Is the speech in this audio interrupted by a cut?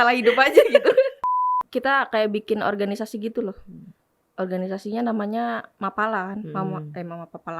yes; 1 cut; at 1.2 s

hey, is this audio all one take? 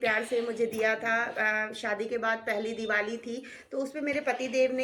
yes; 0 cuts

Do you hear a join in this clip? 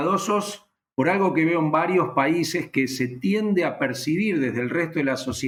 no; 0 cuts

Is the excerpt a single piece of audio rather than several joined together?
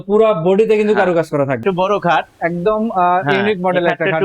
no; 1 cut; at 1.6 s

